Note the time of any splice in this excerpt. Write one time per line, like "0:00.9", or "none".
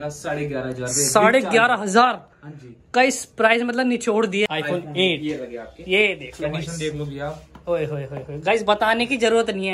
0:04.5